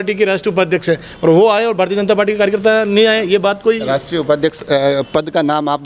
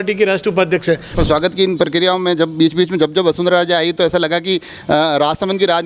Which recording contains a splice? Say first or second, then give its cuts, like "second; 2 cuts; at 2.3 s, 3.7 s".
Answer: second; 1 cut; at 1.1 s